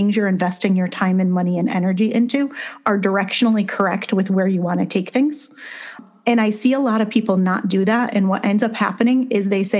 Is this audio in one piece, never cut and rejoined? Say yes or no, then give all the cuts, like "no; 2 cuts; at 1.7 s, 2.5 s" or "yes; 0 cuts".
no; 1 cut; at 5.7 s